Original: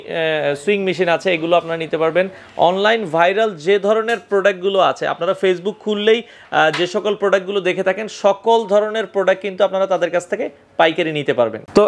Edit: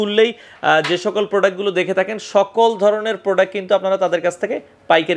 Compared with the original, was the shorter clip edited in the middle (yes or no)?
no